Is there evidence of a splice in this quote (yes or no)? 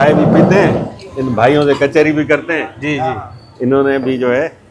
no